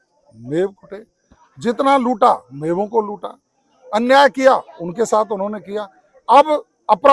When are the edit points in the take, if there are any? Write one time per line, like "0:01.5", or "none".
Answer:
none